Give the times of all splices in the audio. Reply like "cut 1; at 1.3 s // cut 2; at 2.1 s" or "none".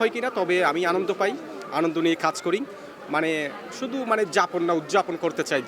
none